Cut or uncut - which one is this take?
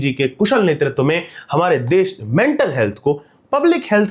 uncut